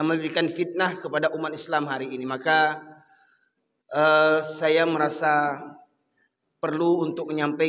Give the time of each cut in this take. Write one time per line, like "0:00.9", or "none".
none

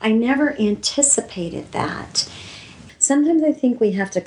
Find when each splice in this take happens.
0:02.8

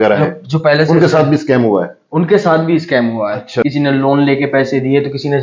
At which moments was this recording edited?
0:03.6

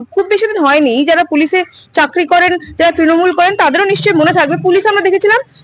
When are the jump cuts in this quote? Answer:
none

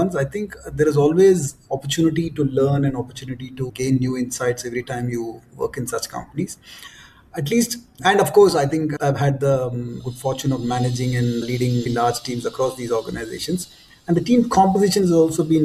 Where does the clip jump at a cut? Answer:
none

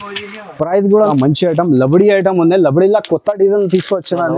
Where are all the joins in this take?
0:01.1

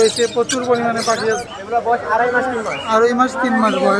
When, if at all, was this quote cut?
0:01.6

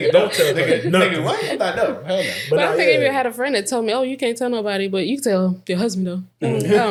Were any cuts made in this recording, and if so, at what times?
none

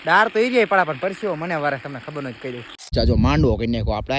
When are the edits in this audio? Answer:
0:02.9

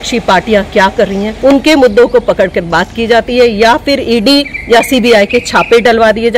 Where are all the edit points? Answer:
0:01.3
0:04.5

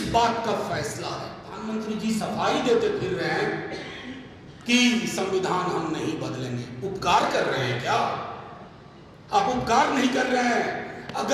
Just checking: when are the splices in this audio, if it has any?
0:01.6

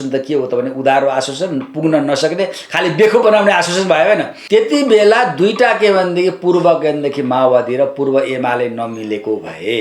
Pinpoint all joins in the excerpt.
0:04.3

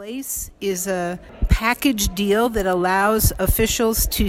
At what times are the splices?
0:01.3

